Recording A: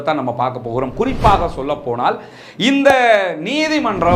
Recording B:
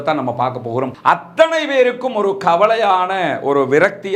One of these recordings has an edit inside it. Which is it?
B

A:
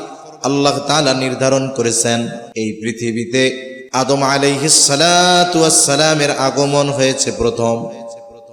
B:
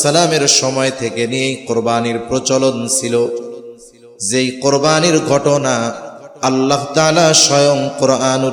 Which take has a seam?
A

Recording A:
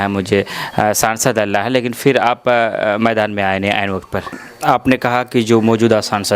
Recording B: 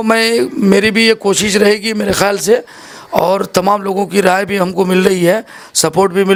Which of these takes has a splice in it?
A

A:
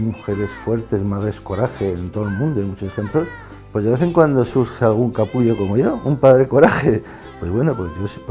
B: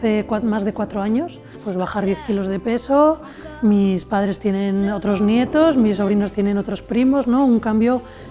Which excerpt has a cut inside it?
B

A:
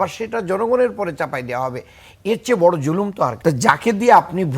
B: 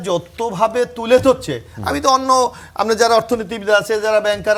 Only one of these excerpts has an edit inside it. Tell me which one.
A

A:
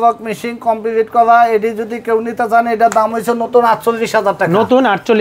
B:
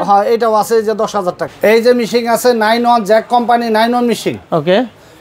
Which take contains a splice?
B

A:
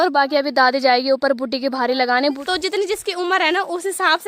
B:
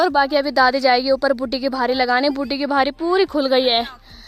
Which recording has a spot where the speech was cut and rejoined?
A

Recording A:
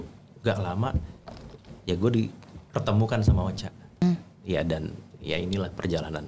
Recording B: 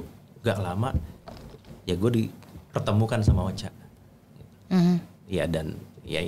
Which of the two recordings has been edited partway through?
A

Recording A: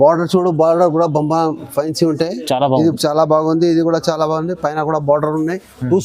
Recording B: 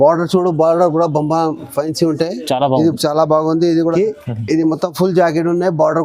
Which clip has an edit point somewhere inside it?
B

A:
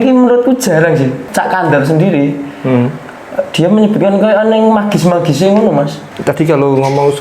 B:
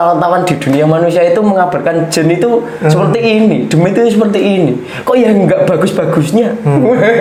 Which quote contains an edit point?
A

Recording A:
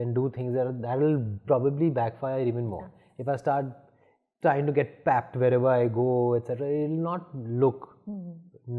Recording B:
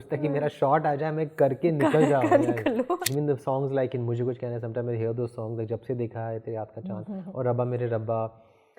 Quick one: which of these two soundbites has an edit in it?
B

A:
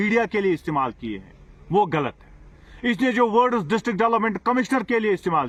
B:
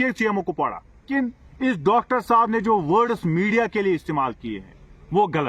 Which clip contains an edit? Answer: B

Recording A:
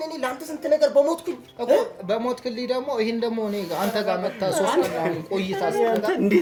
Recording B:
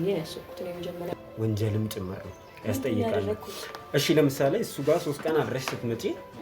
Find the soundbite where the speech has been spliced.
B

